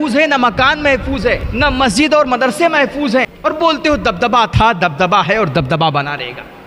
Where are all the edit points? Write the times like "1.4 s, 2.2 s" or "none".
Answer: 1.5 s, 3.3 s